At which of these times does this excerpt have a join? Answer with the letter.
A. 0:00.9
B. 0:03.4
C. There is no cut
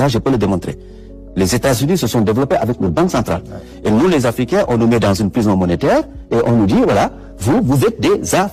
C